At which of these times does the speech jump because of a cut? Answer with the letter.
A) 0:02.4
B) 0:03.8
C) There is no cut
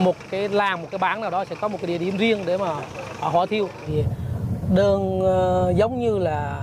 B